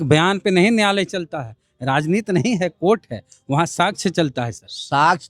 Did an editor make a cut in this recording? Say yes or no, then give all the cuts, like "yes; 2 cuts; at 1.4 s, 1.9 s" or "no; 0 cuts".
no; 0 cuts